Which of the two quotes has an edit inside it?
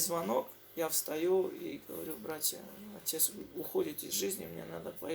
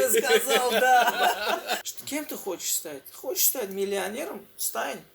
second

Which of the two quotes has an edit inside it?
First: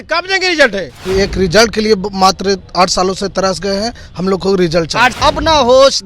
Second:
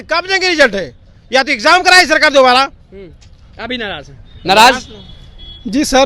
first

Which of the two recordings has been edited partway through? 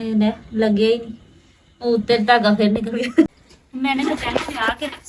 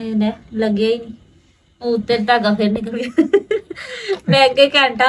first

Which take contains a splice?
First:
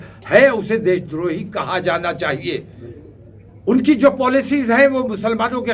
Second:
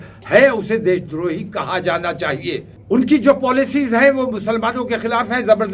second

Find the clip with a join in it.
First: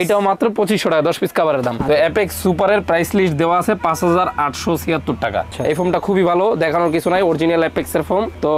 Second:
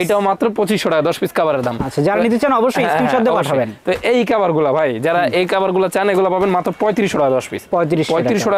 first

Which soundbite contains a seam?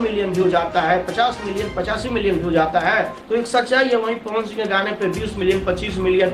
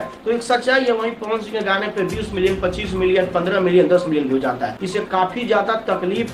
second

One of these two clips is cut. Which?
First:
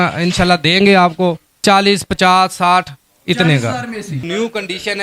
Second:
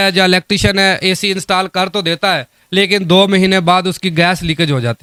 first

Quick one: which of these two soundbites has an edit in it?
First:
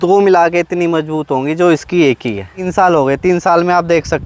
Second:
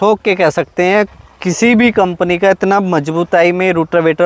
first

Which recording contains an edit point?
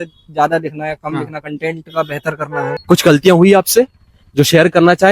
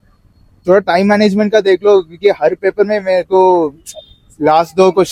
first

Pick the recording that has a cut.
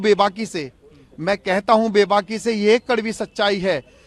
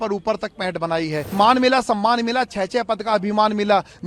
second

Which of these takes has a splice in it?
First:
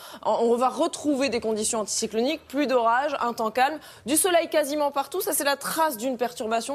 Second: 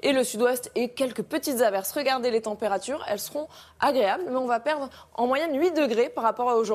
first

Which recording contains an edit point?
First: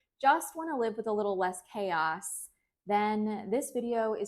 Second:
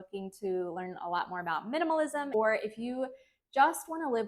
second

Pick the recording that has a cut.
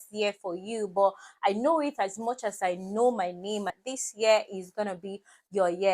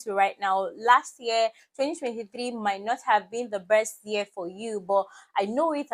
first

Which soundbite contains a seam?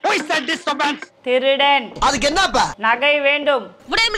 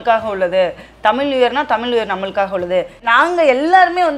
second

